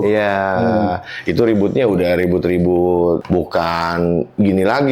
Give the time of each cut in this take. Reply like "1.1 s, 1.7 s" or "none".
3.2 s